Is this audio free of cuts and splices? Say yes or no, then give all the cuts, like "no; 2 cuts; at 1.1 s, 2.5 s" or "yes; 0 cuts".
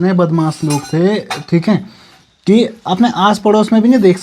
yes; 0 cuts